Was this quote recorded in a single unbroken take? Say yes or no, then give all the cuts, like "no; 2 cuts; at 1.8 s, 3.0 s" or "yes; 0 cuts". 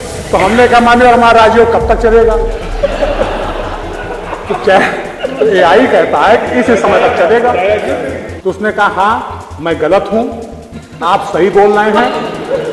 no; 1 cut; at 8.3 s